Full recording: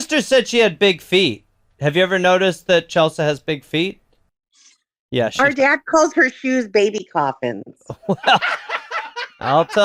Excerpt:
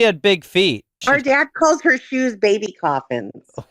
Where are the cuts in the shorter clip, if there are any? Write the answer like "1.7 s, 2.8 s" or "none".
1.0 s